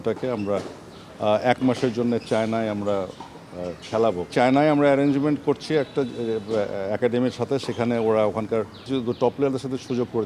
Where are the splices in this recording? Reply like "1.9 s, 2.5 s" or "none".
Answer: 4.3 s, 8.8 s